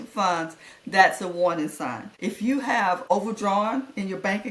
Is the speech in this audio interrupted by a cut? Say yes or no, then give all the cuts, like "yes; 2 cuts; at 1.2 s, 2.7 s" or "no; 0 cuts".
yes; 2 cuts; at 2.1 s, 3.0 s